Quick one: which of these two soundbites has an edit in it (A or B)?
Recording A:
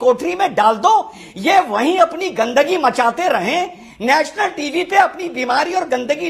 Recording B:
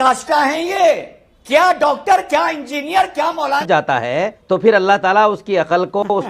B